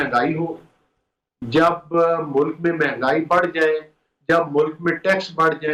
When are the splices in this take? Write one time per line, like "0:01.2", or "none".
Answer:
none